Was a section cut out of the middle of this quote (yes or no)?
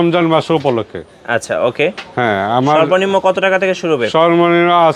no